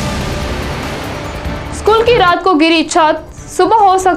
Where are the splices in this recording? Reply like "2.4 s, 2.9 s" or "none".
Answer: 1.7 s